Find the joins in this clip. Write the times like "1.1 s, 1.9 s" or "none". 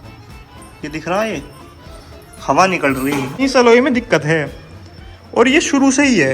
3.4 s